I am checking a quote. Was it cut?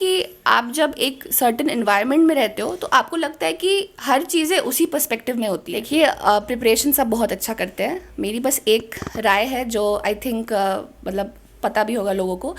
yes; 1 cut; at 5.7 s

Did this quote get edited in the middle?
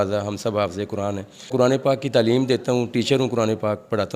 yes; 1 cut; at 1.5 s

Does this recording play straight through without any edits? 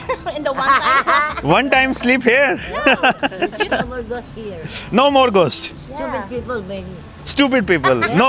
no; 1 cut; at 3.7 s

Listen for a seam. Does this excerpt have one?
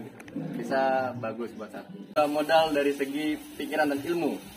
yes; 1 cut; at 2.1 s

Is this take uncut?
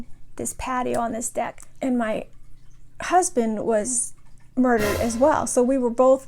no; 1 cut; at 1.6 s

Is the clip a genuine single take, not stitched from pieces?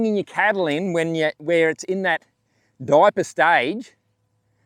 yes; 0 cuts

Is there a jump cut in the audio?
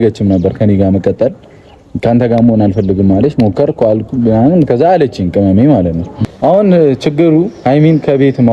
yes; 1 cut; at 6.2 s

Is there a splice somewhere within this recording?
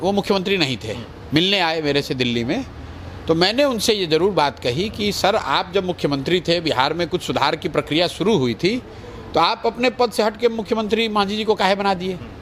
no; 0 cuts

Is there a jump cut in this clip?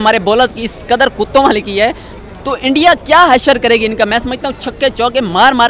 no; 0 cuts

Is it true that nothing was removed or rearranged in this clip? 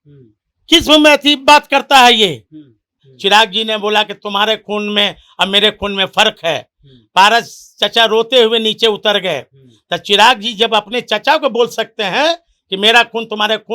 no; 1 cut; at 3.0 s

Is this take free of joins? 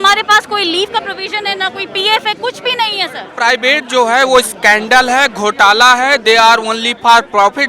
no; 1 cut; at 3.3 s

